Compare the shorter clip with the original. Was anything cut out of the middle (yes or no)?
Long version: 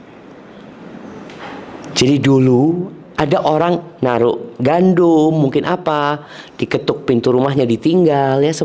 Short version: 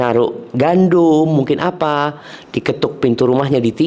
no